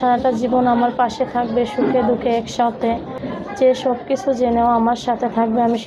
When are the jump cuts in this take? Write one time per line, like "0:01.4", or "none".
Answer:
0:03.2